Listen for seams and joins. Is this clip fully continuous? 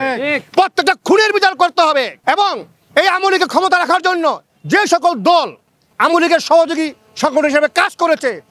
no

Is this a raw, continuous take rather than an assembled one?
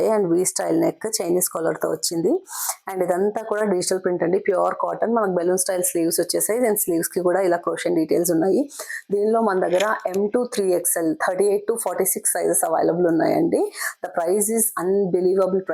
yes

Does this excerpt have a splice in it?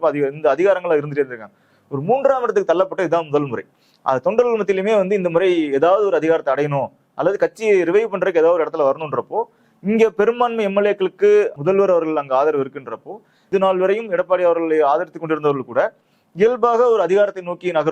yes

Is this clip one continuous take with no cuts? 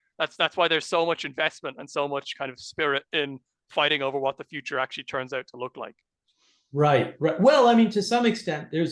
yes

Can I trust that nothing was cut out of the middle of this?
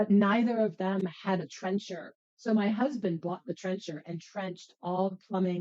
no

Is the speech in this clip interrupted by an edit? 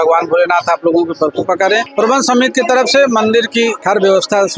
yes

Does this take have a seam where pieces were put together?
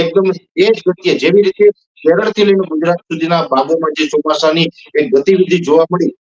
no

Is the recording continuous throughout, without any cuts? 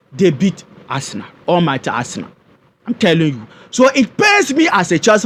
yes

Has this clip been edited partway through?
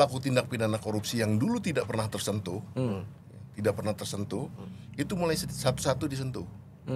no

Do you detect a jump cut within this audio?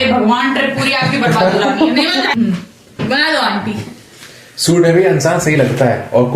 yes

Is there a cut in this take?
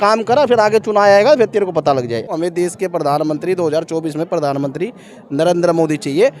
yes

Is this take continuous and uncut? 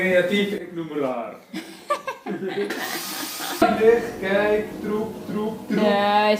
no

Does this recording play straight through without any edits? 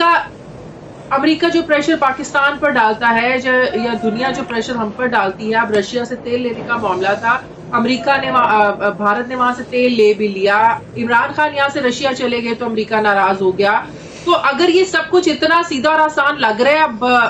yes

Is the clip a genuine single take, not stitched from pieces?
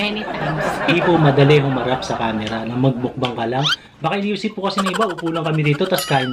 no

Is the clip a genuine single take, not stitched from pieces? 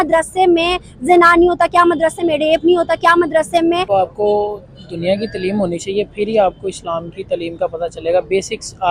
no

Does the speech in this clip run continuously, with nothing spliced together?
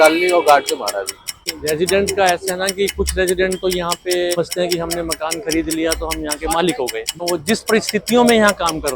no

